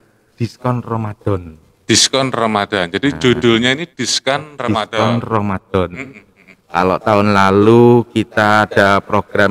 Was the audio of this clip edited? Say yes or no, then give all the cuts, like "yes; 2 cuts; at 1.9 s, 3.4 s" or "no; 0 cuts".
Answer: no; 0 cuts